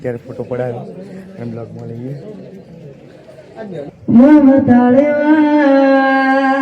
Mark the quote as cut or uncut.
cut